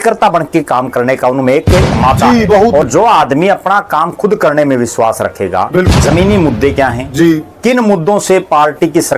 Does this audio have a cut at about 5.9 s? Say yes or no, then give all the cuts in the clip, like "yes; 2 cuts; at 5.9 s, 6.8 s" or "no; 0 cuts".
yes; 2 cuts; at 2.8 s, 5.9 s